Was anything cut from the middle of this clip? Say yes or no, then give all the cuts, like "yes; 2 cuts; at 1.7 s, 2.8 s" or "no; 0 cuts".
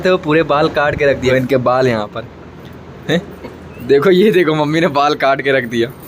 yes; 1 cut; at 1.3 s